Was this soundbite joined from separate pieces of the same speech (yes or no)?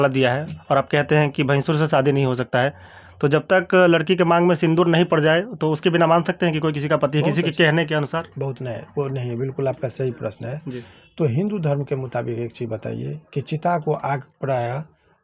no